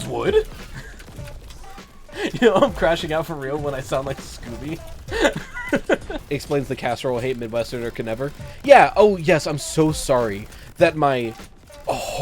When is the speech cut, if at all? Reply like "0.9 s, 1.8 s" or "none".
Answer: 6.1 s